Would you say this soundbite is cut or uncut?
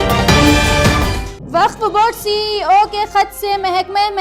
uncut